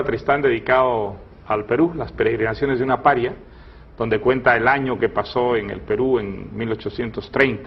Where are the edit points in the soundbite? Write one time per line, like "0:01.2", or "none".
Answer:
0:04.4